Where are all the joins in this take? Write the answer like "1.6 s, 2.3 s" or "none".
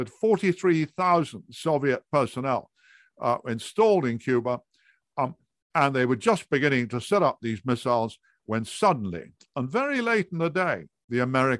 none